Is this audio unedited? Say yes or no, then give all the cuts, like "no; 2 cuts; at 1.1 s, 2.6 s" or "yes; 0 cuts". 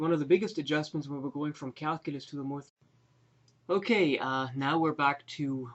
yes; 0 cuts